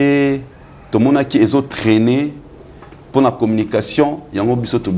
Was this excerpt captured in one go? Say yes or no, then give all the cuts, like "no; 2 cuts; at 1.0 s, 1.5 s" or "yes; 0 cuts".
yes; 0 cuts